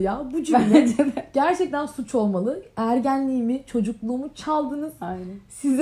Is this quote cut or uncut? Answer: uncut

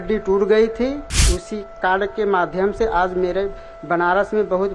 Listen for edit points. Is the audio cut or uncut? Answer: cut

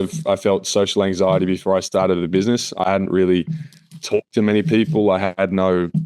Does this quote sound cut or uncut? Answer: uncut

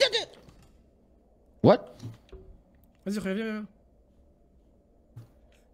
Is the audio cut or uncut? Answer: uncut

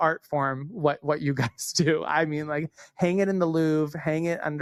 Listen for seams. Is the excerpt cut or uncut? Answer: uncut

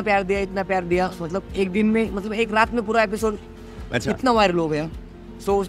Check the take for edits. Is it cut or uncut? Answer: uncut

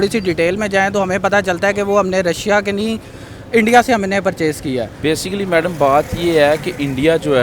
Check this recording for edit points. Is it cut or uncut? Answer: cut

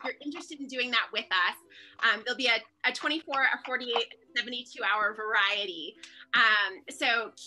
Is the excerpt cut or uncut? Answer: uncut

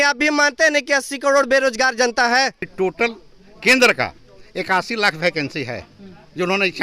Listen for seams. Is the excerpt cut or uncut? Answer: cut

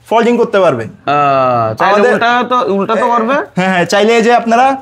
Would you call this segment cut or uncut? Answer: uncut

